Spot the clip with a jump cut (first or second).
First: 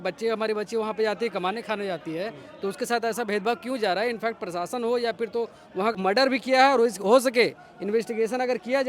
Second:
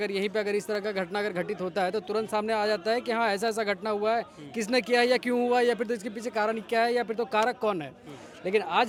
first